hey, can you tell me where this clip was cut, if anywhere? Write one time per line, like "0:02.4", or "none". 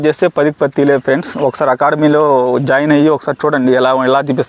none